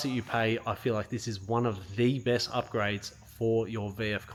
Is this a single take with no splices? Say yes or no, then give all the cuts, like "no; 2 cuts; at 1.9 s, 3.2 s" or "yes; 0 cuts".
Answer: yes; 0 cuts